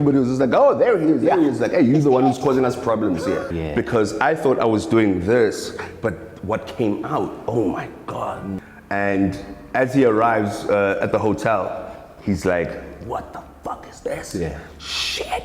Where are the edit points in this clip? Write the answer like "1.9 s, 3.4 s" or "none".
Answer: 3.4 s, 8.7 s